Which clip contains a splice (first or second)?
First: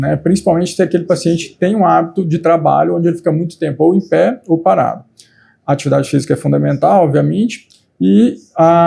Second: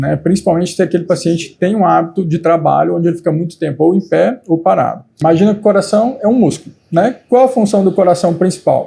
second